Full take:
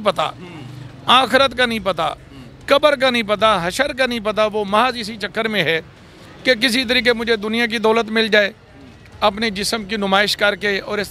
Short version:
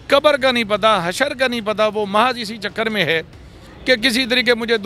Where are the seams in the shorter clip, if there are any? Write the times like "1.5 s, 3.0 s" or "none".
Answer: none